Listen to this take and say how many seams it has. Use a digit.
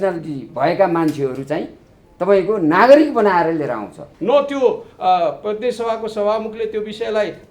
1